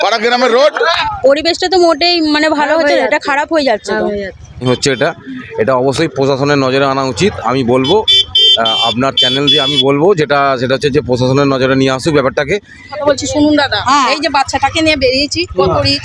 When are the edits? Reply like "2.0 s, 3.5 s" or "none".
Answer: 1.0 s, 4.5 s, 12.9 s